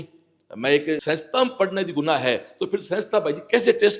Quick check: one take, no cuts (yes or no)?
no